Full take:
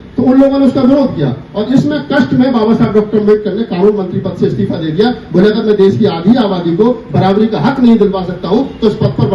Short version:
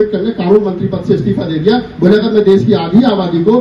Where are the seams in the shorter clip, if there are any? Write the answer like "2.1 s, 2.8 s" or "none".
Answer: none